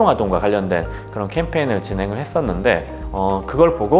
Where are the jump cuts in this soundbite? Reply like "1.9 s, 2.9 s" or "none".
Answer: 2.9 s

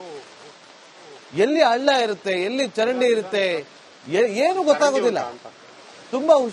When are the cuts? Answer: 1.2 s

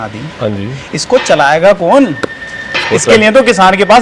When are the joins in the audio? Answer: none

